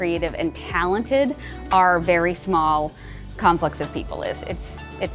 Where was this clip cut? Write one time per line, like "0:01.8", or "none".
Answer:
none